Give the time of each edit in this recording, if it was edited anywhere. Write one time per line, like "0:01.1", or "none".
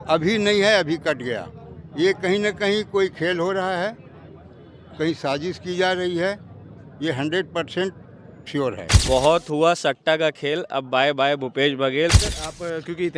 0:08.9
0:12.2